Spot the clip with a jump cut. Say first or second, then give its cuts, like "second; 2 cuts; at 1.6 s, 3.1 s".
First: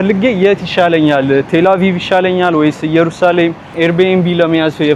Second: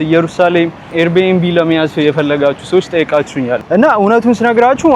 second; 1 cut; at 3.6 s